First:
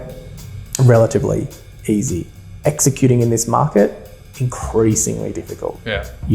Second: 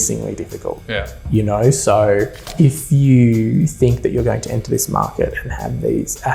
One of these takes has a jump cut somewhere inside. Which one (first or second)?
second